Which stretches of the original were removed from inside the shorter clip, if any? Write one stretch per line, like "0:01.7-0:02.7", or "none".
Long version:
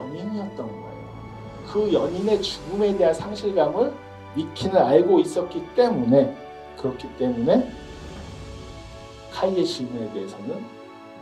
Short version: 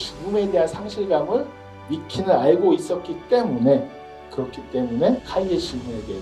0:07.7-0:09.3

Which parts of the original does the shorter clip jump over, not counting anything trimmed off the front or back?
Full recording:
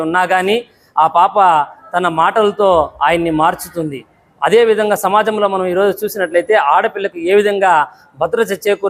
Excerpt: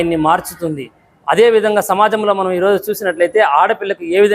none

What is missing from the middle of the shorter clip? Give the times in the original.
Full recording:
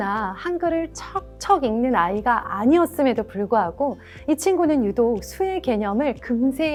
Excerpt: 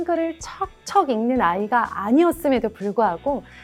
none

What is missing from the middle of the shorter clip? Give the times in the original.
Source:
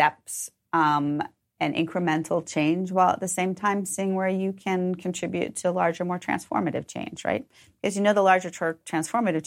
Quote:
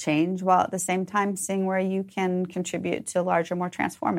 none

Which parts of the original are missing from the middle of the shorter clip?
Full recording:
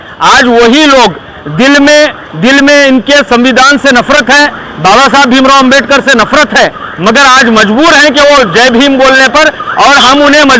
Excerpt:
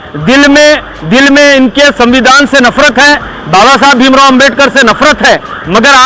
none

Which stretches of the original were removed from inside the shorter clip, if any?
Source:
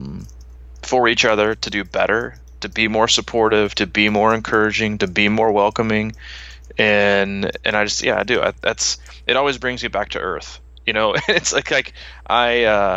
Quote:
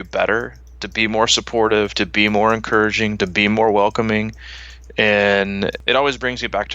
0:07.6-0:09.2

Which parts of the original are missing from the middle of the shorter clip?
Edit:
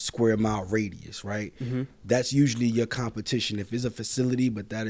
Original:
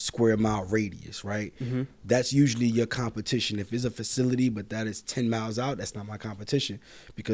none

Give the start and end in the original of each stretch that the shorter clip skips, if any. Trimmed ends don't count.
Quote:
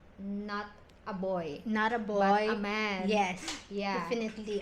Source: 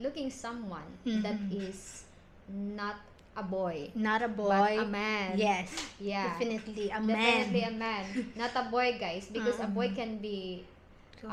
none

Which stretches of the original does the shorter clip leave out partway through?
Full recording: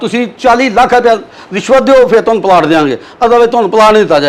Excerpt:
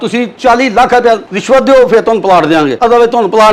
0:01.3-0:01.5
0:02.9-0:03.1

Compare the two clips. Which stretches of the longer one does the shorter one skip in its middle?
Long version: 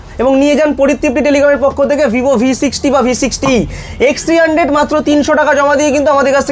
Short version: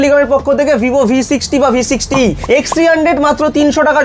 0:03.7-0:03.9

